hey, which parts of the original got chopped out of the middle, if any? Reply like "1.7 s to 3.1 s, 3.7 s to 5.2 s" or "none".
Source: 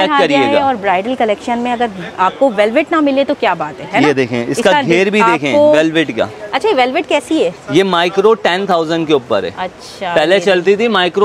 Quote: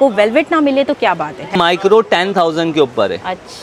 3.9 s to 7.9 s